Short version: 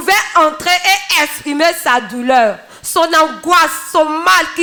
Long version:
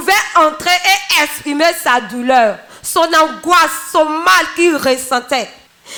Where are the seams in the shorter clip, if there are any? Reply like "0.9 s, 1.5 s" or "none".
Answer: none